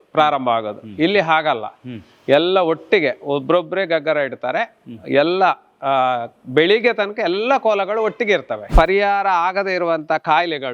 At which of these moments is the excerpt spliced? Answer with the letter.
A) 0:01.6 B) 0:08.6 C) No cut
B